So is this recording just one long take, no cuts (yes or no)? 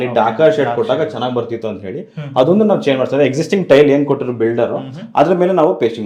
yes